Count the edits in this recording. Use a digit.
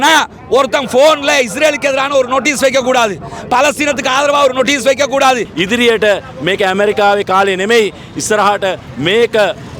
1